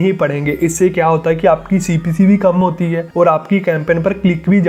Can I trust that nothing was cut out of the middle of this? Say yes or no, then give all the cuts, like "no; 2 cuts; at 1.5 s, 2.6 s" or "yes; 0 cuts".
yes; 0 cuts